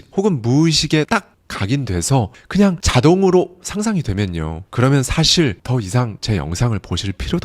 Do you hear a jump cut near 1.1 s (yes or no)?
yes